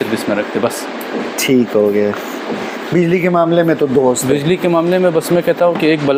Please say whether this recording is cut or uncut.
uncut